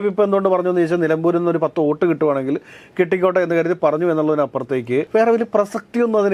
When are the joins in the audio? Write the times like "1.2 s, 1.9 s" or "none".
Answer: 5.1 s